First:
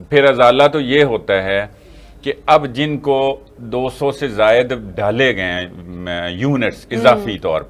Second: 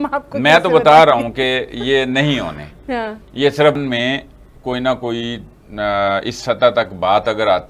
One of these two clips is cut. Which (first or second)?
second